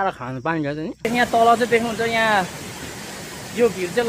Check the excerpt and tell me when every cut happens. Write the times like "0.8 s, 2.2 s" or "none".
1.1 s